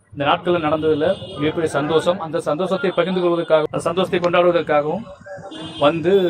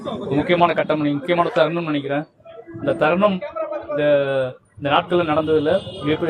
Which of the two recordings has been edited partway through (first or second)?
first